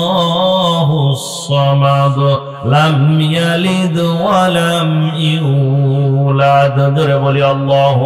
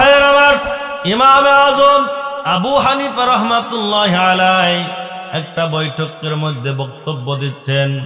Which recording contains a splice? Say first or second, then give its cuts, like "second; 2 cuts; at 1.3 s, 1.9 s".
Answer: second; 2 cuts; at 1.2 s, 2.3 s